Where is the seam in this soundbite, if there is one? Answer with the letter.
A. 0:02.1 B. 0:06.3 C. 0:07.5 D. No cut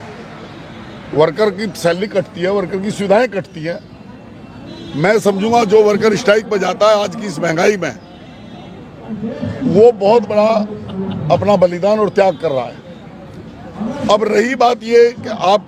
D